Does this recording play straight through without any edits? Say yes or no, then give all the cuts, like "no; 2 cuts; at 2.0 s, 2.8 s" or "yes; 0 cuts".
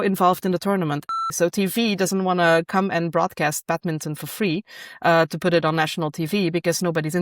no; 1 cut; at 1.1 s